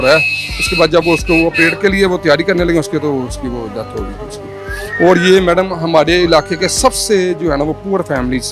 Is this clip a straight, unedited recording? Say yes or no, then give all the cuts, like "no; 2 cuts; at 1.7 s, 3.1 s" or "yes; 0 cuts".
yes; 0 cuts